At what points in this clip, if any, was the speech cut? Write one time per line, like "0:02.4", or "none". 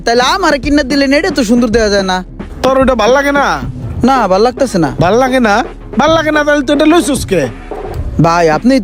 none